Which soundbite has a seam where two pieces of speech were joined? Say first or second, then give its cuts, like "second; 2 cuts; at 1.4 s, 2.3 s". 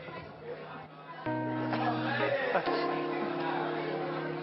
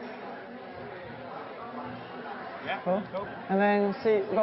second; 1 cut; at 3.5 s